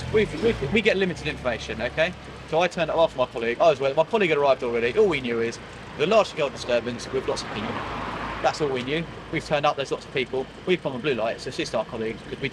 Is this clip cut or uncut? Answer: uncut